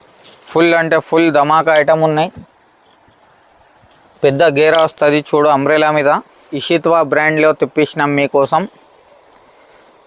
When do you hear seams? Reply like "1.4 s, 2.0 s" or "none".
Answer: 6.5 s